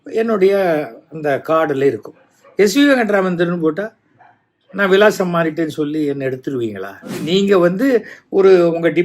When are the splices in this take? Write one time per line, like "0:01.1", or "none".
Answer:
0:07.2